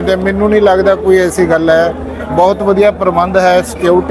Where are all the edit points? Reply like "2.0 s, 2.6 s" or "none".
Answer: none